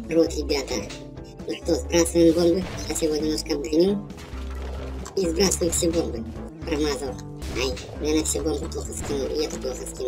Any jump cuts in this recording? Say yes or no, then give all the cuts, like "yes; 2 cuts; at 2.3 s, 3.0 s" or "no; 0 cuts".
yes; 2 cuts; at 6.5 s, 7.3 s